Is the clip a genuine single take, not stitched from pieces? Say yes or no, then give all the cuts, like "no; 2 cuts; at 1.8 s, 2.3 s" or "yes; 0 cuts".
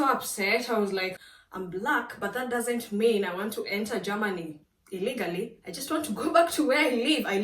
no; 1 cut; at 1.2 s